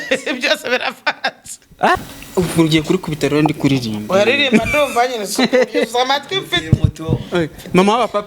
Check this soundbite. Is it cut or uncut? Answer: cut